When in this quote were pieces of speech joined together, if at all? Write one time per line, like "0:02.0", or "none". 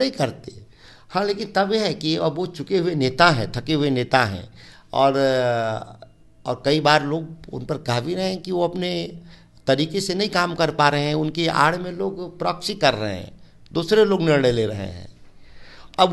none

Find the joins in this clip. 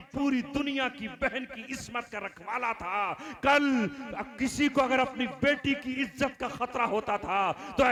none

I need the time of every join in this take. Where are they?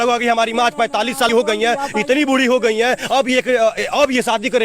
0:01.3

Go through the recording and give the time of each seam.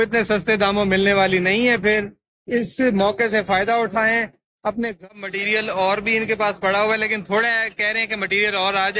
0:04.9

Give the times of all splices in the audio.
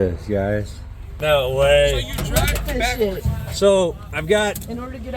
0:01.3

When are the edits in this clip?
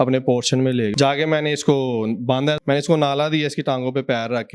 0:00.9
0:02.6

